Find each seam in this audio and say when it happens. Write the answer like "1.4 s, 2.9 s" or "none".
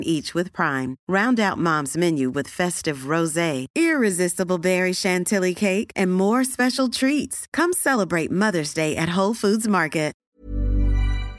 10.2 s